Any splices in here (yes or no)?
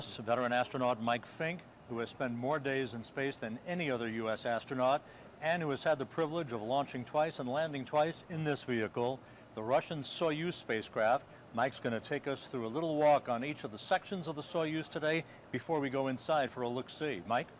yes